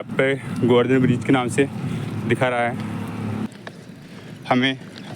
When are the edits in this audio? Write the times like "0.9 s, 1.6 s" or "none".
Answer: 3.5 s